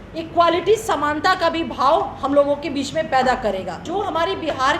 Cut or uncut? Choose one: cut